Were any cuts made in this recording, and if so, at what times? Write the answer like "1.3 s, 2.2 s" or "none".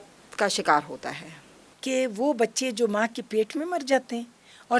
none